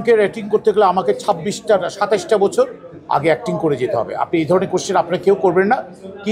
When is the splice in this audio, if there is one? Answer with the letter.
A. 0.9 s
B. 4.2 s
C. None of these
C